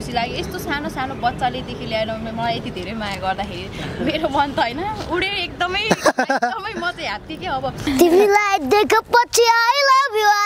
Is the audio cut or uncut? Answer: cut